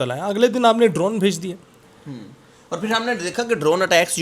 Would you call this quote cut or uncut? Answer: uncut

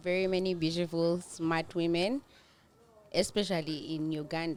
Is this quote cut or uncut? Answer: uncut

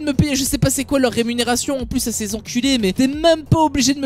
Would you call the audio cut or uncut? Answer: uncut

